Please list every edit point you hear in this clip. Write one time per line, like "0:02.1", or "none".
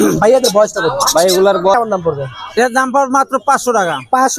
0:01.7